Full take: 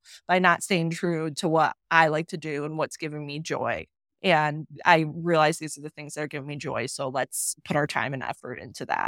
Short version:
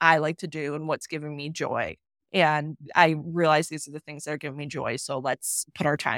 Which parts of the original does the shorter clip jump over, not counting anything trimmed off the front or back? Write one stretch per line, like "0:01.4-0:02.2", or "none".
none

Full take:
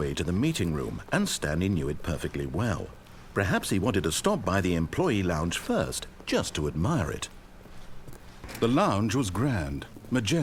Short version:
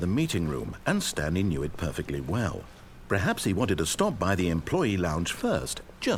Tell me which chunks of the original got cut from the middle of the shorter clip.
none

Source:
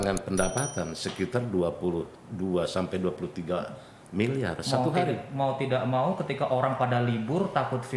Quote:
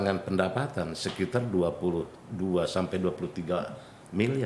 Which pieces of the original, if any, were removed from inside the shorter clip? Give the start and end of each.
none

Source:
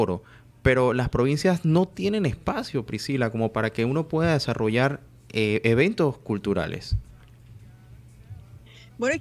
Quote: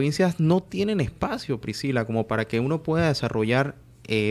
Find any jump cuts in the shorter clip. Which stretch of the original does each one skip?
none

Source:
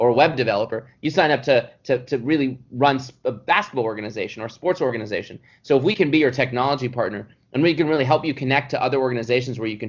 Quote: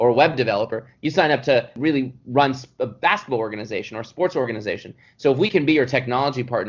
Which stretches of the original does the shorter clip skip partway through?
0:01.8-0:02.2

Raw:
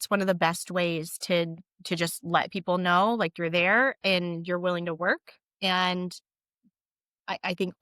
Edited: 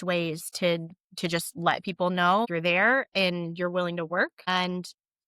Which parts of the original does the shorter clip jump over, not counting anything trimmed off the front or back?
0:03.1-0:03.4
0:05.4-0:05.7

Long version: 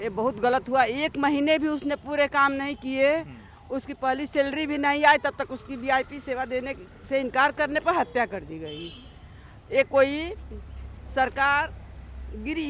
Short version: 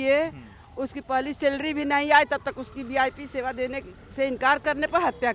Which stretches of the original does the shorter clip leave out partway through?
none

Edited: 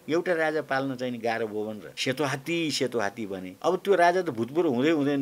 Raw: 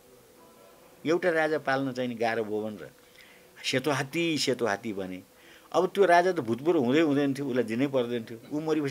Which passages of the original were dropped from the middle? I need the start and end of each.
0:02.8-0:03.5
0:05.1-0:05.6

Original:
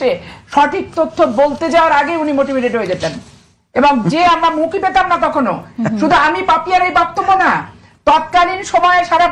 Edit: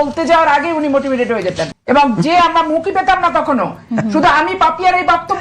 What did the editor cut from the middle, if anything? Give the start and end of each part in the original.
0:03.1-0:03.6

